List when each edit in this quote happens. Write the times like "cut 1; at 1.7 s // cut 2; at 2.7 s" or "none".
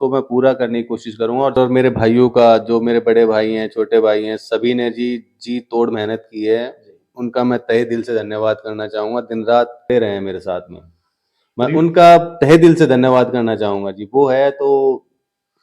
cut 1; at 1.6 s // cut 2; at 9.9 s